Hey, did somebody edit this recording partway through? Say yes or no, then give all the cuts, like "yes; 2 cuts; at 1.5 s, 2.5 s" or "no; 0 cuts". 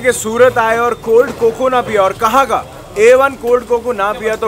no; 0 cuts